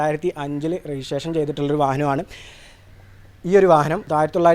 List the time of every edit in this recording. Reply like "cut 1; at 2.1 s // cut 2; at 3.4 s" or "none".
none